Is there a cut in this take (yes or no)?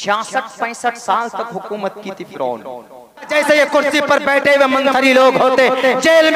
yes